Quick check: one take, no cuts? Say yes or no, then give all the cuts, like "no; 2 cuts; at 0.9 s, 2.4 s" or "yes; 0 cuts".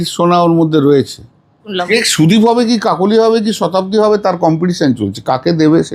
no; 1 cut; at 1.7 s